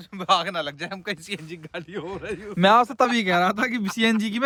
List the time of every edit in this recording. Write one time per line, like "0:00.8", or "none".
none

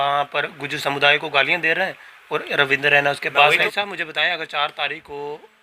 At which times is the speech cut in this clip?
0:03.6

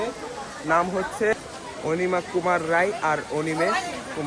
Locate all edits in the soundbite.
0:01.3

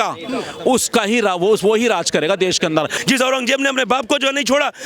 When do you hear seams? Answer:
0:02.9

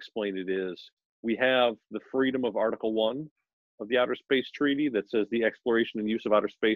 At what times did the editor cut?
none

